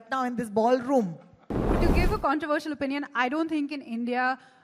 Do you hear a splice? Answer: yes; 1 cut; at 1.7 s

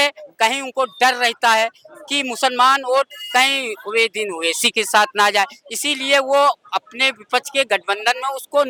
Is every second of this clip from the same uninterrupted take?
yes; 0 cuts

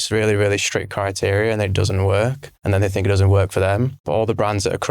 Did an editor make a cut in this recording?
yes; 2 cuts; at 2.5 s, 4.0 s

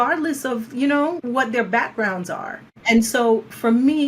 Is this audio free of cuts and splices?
no; 2 cuts; at 1.2 s, 2.7 s

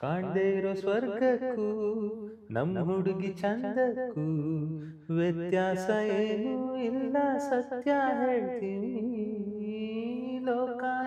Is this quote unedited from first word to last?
yes; 0 cuts

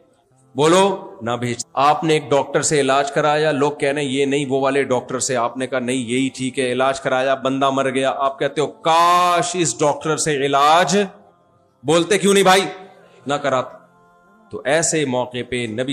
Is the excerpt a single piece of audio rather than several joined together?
no; 1 cut; at 14.1 s

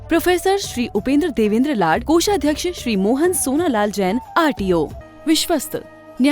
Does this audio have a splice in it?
yes; 1 cut; at 5.0 s

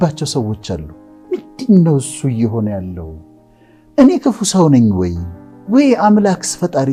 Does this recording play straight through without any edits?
yes; 0 cuts

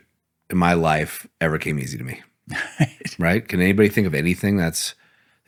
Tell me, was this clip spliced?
no; 0 cuts

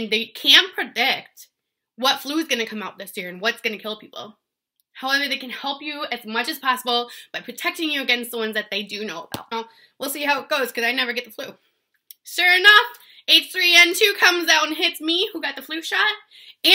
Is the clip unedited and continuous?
no; 1 cut; at 9.5 s

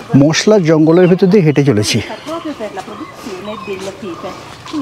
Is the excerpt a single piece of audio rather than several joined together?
yes; 0 cuts

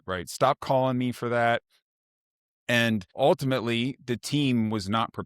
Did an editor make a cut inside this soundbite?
yes; 1 cut; at 3.1 s

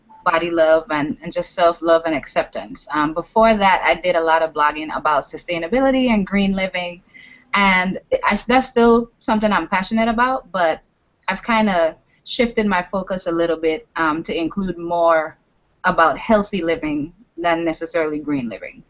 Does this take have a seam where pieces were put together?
no; 0 cuts

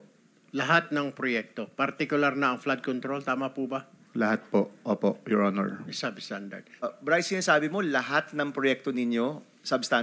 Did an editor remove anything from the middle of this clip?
yes; 1 cut; at 6.8 s

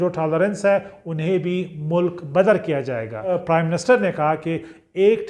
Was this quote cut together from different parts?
yes; 1 cut; at 3.3 s

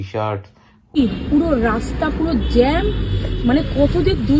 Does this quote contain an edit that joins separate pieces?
yes; 1 cut; at 1.0 s

